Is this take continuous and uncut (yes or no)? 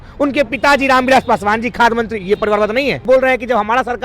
no